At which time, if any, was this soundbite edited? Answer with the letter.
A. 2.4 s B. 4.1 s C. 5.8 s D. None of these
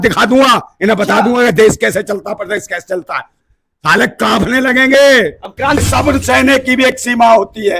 C